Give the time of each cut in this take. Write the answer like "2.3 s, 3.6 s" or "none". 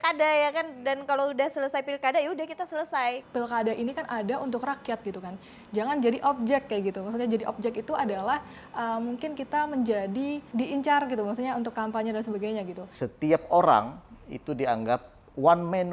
3.2 s, 10.5 s, 12.9 s